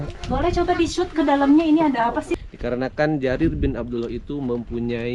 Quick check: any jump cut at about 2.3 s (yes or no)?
yes